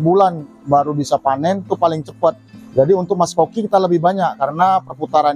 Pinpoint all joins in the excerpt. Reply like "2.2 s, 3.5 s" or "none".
2.5 s